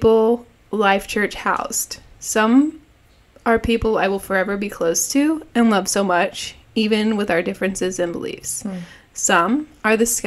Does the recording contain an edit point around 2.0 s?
no; 0 cuts

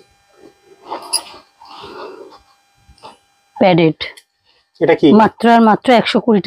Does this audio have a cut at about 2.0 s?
no; 0 cuts

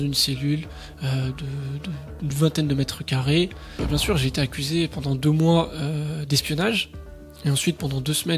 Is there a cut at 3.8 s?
yes; 1 cut; at 3.8 s

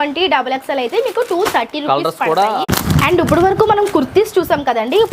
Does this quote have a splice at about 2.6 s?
yes; 1 cut; at 2.6 s

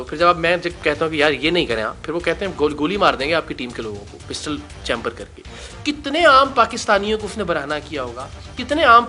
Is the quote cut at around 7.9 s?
no; 1 cut; at 5.7 s

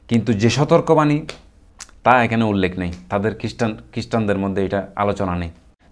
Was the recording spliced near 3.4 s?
no; 0 cuts

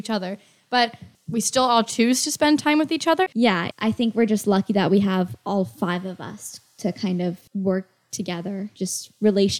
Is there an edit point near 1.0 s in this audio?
yes; 4 cuts; at 1.0 s, 3.4 s, 7.4 s, 8.7 s

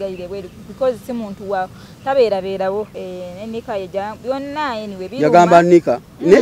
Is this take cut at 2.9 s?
yes; 1 cut; at 2.9 s

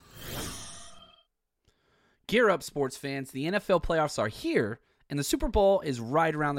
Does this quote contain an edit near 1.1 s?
yes; 1 cut; at 1.1 s

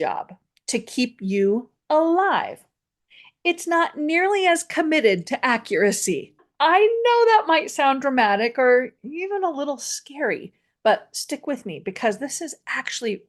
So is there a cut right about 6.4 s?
yes; 1 cut; at 6.4 s

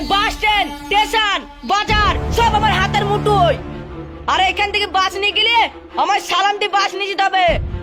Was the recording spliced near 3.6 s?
no; 0 cuts

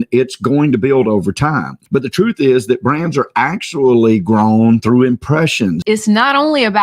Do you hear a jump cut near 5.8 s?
yes; 2 cuts; at 1.7 s, 5.8 s

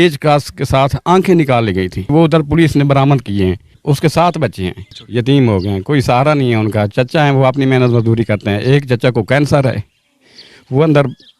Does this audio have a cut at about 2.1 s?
yes; 3 cuts; at 2.1 s, 3.7 s, 5.0 s

